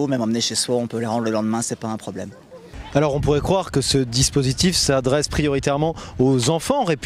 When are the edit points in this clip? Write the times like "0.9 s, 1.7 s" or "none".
5.8 s